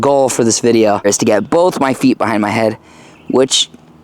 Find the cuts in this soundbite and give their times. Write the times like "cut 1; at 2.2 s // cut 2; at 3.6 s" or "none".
cut 1; at 1.0 s